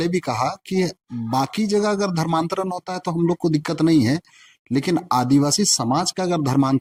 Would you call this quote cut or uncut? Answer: uncut